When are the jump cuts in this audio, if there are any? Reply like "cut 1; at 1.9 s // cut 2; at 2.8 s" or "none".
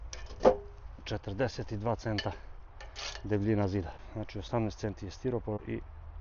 none